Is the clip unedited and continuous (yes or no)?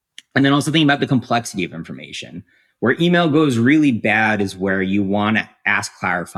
yes